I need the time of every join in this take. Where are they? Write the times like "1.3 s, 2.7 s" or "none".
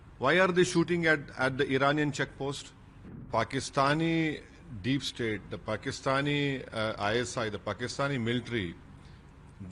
3.3 s